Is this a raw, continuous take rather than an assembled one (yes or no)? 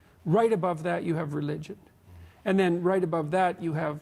yes